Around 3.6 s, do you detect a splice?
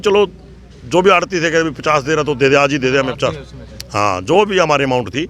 no; 0 cuts

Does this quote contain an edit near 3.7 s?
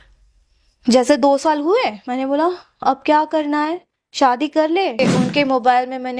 no; 1 cut; at 5.0 s

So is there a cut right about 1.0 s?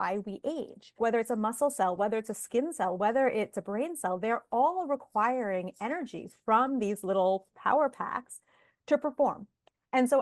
yes; 1 cut; at 1.0 s

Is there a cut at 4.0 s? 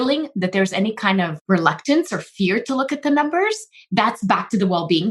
no; 1 cut; at 1.3 s

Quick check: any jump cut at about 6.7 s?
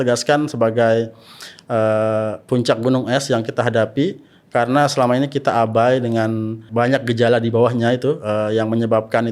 yes; 1 cut; at 6.7 s

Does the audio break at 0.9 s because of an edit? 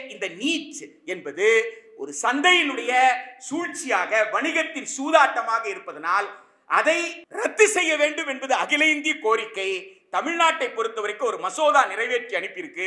no; 1 cut; at 7.2 s

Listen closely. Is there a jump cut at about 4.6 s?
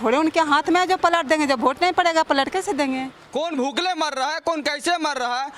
no; 1 cut; at 3.2 s

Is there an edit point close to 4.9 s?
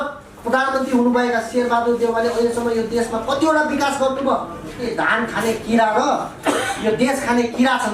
yes; 1 cut; at 4.9 s

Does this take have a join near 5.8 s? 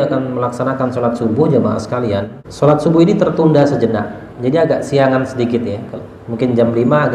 no; 1 cut; at 2.4 s

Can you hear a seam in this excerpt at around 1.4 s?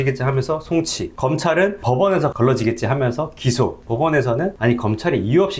yes; 3 cuts; at 1.4 s, 3.8 s, 4.6 s

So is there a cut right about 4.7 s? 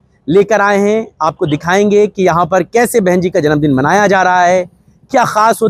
no; 0 cuts

